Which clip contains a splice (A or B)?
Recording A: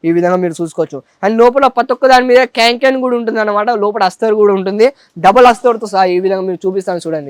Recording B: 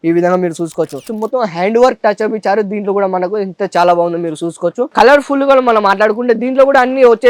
B